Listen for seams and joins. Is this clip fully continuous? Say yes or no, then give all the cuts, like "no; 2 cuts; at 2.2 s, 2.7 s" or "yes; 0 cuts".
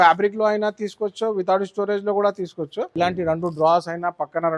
no; 1 cut; at 2.9 s